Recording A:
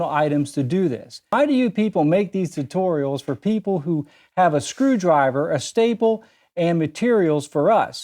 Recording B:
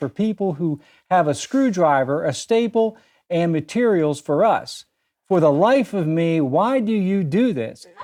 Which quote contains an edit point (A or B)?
A